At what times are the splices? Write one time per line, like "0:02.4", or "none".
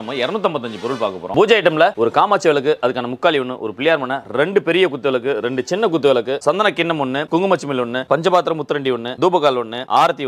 0:01.3